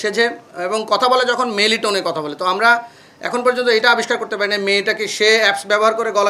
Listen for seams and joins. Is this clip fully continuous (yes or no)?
yes